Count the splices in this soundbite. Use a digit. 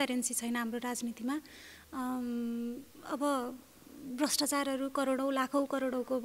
0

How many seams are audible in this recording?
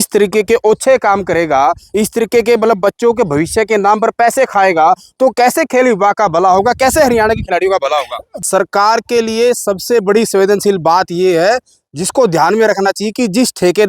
1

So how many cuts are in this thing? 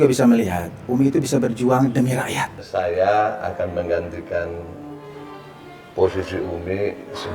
1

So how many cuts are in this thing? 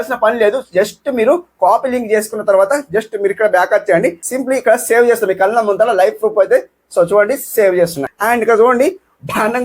2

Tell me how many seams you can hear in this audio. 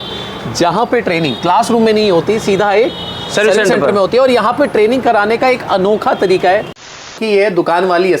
1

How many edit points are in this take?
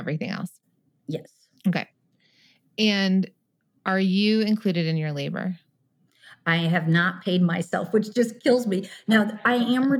0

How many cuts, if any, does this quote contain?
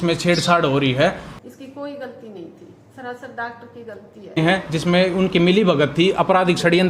2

